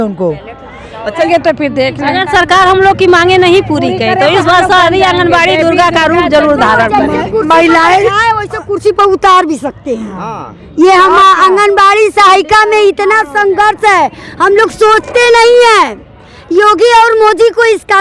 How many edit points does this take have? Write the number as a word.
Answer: one